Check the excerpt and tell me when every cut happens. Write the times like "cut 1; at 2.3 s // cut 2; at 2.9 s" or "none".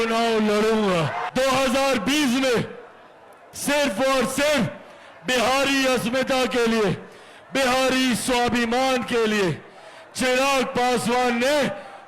cut 1; at 1.2 s